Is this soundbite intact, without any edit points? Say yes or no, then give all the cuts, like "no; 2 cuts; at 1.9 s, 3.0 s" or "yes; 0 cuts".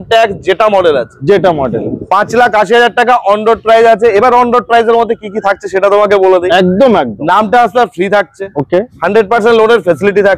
yes; 0 cuts